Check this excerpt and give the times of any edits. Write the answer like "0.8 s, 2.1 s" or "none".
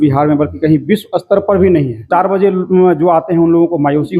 2.0 s